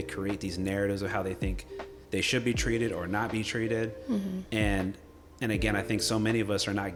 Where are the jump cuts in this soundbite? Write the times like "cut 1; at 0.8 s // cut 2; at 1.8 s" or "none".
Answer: none